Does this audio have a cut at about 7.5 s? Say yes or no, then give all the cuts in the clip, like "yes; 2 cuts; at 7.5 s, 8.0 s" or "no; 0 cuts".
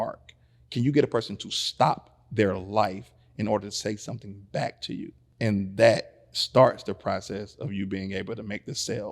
no; 1 cut; at 5.2 s